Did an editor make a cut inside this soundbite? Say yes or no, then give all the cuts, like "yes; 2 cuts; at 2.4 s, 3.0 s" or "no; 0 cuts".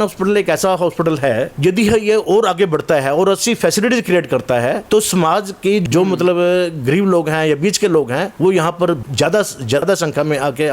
yes; 5 cuts; at 1.5 s, 4.8 s, 5.8 s, 8.3 s, 9.4 s